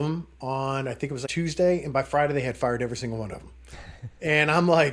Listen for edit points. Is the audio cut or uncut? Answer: cut